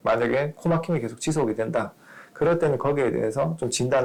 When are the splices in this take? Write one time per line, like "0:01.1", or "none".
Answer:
none